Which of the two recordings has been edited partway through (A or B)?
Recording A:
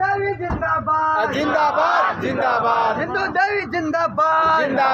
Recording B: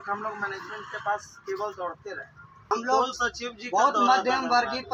B